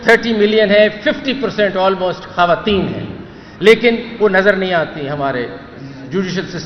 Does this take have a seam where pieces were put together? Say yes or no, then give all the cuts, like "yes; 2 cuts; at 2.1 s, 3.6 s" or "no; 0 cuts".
no; 0 cuts